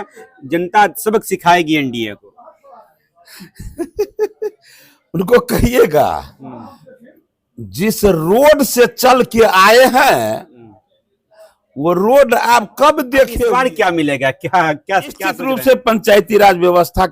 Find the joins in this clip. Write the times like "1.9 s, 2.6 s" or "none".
13.4 s, 15.4 s